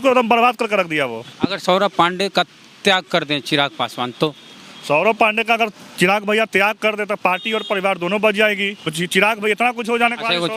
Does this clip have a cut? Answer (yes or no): yes